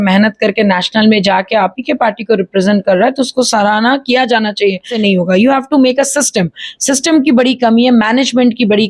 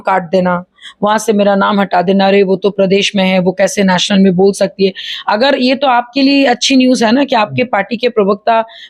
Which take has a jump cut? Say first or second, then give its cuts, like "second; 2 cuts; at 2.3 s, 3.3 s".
first; 1 cut; at 4.9 s